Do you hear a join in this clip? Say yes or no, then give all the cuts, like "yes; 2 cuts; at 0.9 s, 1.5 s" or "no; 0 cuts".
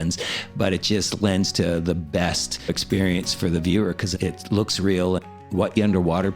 yes; 1 cut; at 5.2 s